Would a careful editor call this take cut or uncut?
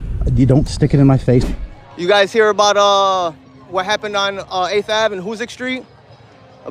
cut